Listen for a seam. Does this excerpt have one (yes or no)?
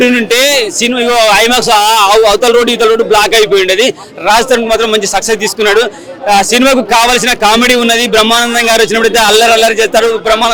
no